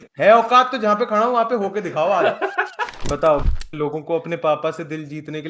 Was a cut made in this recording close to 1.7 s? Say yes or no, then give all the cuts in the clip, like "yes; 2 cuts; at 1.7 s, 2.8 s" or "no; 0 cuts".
no; 1 cut; at 3.0 s